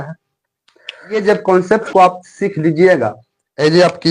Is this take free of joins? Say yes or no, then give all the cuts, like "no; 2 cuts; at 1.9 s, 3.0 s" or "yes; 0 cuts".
no; 1 cut; at 1.1 s